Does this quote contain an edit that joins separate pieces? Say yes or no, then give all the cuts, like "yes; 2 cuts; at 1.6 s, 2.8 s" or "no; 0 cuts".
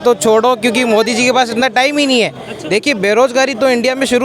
yes; 1 cut; at 2.5 s